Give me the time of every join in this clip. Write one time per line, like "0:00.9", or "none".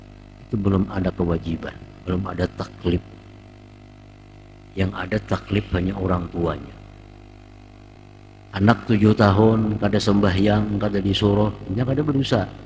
0:08.0